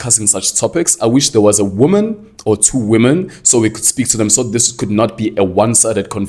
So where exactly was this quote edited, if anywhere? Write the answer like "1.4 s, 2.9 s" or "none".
none